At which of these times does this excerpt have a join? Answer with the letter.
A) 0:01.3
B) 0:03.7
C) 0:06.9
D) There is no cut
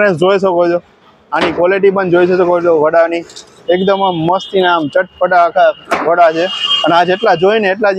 D